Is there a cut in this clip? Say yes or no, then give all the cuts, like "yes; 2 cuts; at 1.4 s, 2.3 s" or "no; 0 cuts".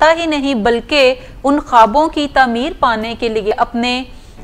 yes; 1 cut; at 3.5 s